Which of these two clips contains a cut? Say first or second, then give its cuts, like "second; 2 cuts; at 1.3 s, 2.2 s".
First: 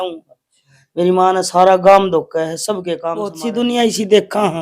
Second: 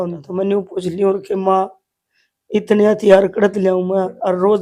first; 1 cut; at 3.3 s